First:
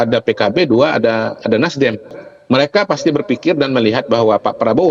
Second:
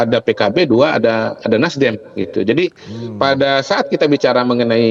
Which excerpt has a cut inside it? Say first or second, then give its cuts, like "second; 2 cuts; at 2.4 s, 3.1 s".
first; 1 cut; at 2.1 s